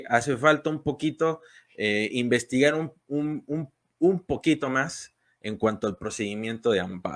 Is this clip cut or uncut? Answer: uncut